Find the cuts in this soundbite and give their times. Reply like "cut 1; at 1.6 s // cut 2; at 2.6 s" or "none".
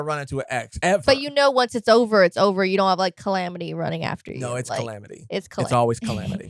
cut 1; at 0.9 s